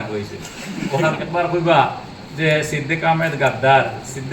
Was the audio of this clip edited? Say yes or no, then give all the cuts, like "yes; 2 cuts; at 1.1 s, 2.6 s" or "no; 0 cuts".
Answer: yes; 1 cut; at 1.2 s